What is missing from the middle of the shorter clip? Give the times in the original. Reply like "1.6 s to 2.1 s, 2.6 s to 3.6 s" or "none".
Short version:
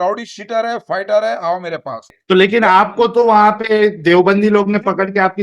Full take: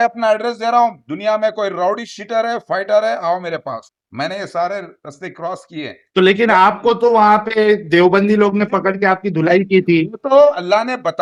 3.9 s to 6.0 s